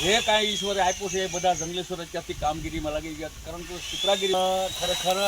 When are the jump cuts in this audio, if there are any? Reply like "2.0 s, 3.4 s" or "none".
4.3 s